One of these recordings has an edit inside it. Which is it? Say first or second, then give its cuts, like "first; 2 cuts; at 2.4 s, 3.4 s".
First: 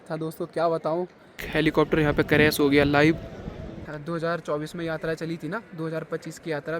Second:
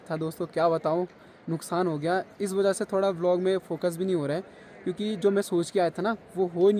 first; 2 cuts; at 1.5 s, 3.8 s